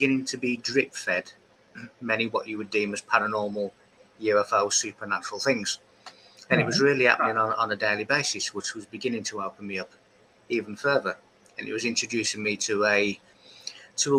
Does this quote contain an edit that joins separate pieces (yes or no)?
no